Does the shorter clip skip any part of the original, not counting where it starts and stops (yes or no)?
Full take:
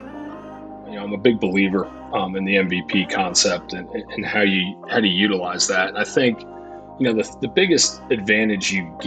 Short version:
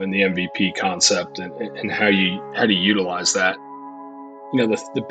yes